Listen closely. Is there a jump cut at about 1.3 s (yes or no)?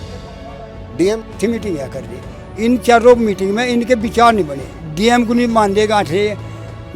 yes